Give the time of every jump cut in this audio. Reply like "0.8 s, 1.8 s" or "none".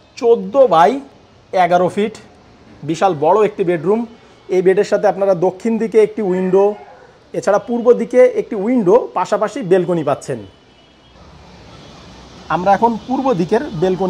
11.1 s